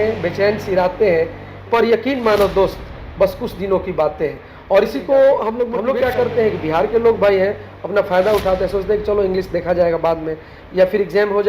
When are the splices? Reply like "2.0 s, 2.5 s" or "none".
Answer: 1.6 s, 5.8 s